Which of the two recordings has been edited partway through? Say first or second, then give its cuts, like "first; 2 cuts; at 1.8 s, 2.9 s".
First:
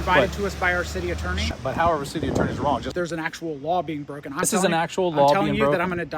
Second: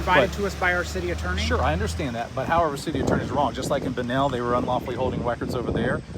first; 3 cuts; at 1.5 s, 2.9 s, 4.5 s